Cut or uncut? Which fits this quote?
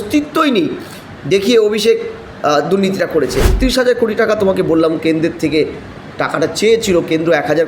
cut